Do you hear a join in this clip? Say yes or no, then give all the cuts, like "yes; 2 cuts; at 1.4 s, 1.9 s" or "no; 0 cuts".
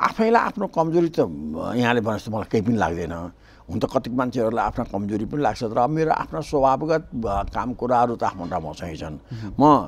no; 0 cuts